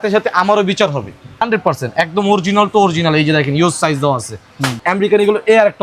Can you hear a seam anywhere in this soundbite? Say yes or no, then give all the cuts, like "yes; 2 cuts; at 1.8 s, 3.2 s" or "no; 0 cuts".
yes; 2 cuts; at 1.5 s, 4.8 s